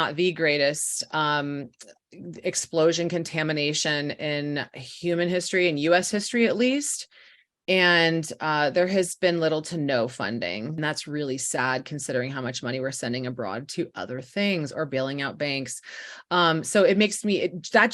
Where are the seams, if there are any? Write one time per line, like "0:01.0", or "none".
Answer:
0:10.8